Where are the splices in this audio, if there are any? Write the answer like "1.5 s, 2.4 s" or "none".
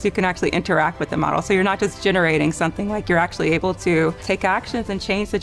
4.2 s